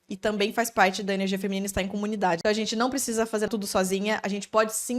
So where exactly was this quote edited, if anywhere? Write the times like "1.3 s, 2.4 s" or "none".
2.4 s, 3.5 s